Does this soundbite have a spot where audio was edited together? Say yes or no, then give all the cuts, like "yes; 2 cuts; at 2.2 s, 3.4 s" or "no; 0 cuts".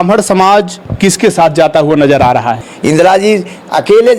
yes; 1 cut; at 2.6 s